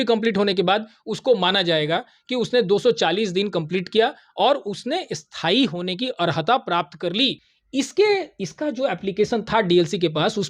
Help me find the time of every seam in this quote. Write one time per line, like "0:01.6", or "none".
0:07.5